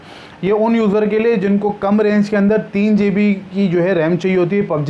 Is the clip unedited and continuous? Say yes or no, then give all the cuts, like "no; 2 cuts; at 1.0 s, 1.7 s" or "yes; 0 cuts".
yes; 0 cuts